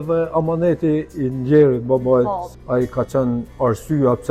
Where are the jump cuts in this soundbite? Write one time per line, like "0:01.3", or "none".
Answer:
0:02.5
0:03.5